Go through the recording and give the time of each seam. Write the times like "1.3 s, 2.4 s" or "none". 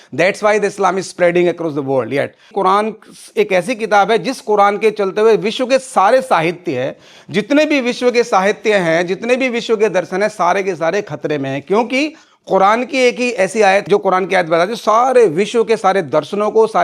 2.4 s, 13.8 s

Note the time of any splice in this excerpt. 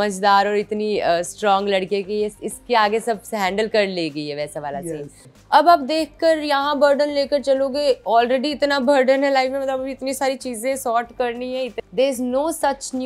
5.4 s, 11.8 s

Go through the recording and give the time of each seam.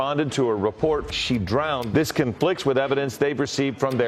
none

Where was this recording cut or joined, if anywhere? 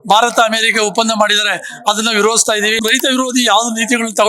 2.8 s

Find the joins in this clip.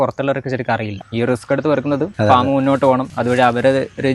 1.0 s, 2.1 s, 3.1 s

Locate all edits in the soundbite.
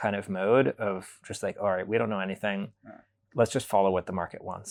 none

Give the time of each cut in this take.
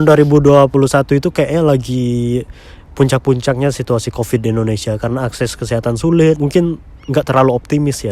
6.4 s

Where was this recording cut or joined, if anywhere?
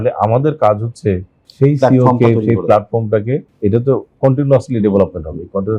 3.5 s

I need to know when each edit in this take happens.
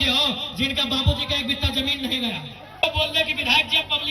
2.8 s

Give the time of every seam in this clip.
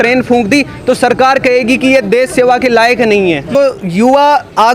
3.6 s

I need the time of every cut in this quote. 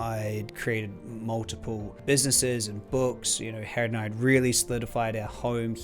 1.9 s

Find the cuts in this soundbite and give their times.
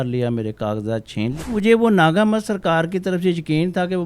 1.5 s

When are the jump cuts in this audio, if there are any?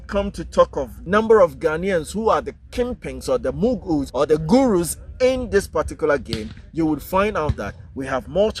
0.9 s, 4.1 s

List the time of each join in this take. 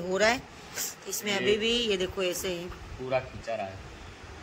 none

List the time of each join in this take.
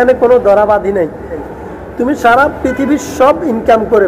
1.5 s

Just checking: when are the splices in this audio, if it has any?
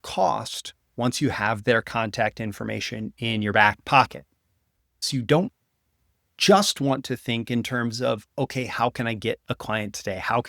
5.0 s

